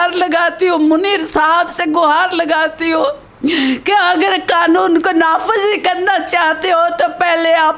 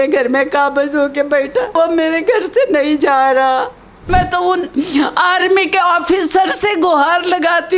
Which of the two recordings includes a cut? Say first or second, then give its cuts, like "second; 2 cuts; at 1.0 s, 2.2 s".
second; 2 cuts; at 1.8 s, 4.1 s